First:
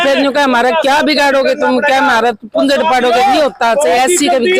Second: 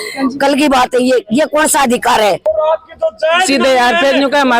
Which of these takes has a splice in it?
second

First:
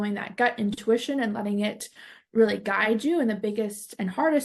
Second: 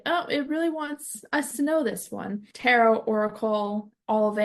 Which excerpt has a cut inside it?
second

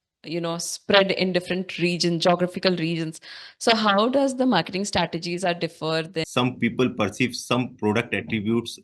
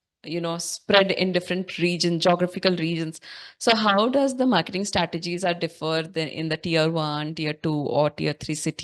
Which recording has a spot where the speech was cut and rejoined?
first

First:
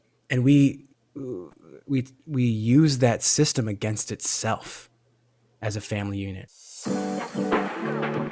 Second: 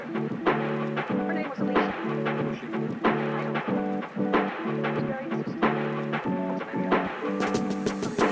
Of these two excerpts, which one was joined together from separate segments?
first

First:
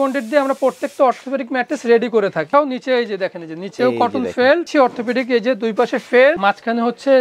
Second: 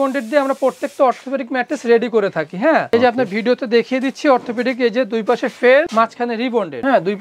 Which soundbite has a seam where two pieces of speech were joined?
first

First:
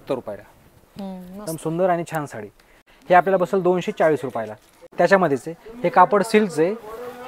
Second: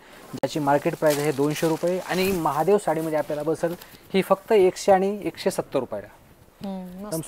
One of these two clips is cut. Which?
first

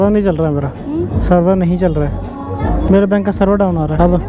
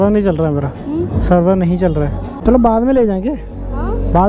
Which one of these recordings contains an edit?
second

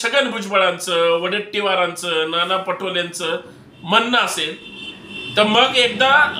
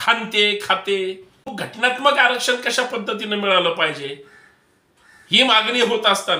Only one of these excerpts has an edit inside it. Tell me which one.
second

